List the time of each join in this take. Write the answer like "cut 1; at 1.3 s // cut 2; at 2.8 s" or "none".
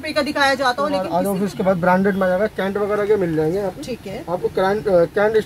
cut 1; at 1.0 s